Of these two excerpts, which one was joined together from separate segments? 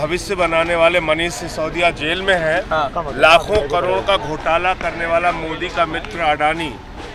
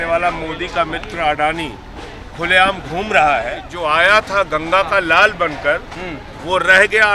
second; 1 cut; at 3.6 s

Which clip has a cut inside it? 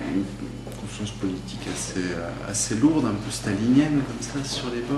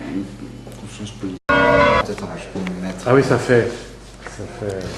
first; 1 cut; at 1.4 s

